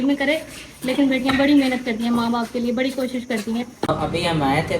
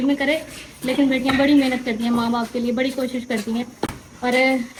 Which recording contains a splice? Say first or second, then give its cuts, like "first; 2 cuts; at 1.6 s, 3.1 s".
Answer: first; 1 cut; at 3.8 s